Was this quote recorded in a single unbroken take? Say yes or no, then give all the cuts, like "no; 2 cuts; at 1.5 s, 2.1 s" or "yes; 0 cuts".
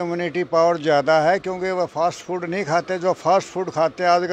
yes; 0 cuts